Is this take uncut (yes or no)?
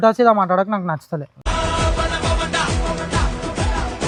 yes